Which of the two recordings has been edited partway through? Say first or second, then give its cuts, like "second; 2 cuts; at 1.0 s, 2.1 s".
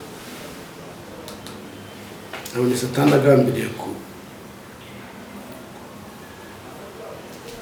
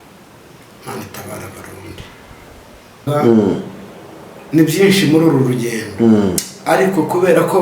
second; 1 cut; at 3.0 s